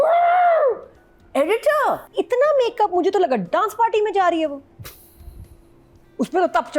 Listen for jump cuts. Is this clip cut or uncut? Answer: cut